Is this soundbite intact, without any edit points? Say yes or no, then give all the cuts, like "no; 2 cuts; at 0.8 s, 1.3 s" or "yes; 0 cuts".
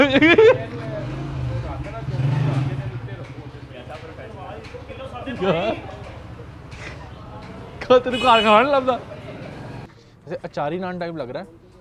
no; 1 cut; at 9.8 s